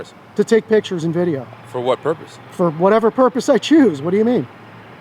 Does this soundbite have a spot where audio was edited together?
no; 0 cuts

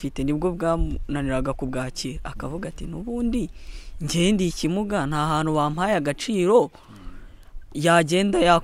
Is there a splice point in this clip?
no; 0 cuts

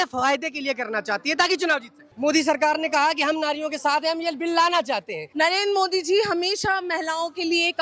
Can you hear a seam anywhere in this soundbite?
yes; 2 cuts; at 2.1 s, 5.2 s

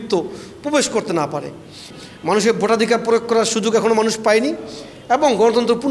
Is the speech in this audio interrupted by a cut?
yes; 1 cut; at 1.8 s

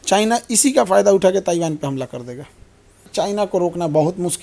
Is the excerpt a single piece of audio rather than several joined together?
no; 1 cut; at 3.1 s

